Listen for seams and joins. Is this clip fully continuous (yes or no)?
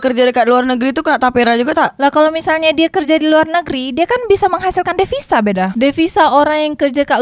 yes